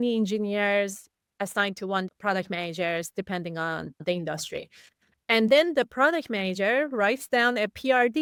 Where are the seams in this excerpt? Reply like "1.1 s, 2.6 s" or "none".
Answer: none